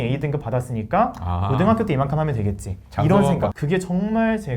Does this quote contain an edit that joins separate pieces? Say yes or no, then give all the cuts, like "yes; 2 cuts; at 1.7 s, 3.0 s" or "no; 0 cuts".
yes; 1 cut; at 3.6 s